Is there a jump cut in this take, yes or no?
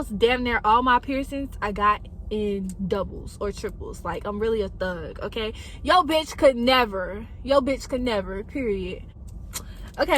yes